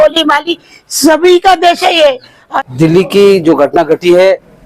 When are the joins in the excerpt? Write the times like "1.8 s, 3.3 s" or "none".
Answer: 2.5 s